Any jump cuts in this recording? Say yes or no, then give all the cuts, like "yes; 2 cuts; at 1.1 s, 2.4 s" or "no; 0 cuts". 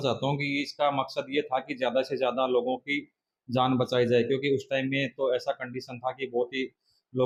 no; 0 cuts